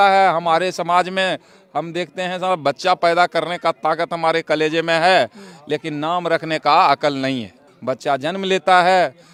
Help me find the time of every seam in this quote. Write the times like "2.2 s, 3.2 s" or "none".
none